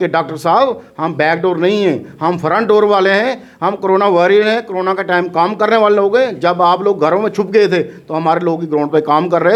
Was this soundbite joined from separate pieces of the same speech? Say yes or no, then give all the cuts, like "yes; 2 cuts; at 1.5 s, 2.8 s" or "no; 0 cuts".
no; 0 cuts